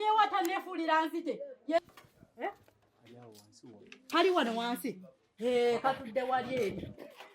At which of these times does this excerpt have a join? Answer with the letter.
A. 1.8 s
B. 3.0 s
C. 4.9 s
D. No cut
A